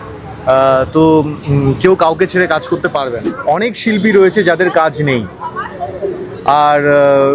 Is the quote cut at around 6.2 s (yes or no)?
no